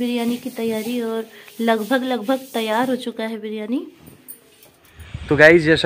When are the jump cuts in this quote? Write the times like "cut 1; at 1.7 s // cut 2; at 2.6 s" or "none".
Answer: cut 1; at 4.8 s